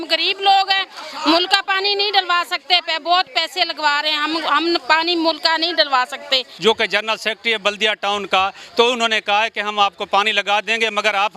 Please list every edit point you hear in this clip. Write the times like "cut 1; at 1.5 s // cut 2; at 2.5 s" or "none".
cut 1; at 6.5 s